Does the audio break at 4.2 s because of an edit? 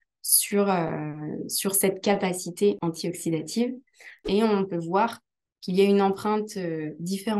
yes; 2 cuts; at 2.8 s, 4.2 s

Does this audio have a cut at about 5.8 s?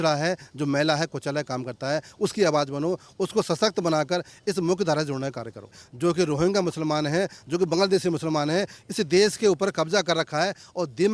yes; 1 cut; at 5.8 s

